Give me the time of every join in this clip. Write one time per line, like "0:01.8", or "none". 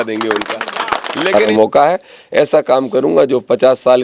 0:01.5